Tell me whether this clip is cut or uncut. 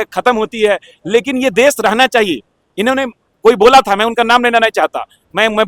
uncut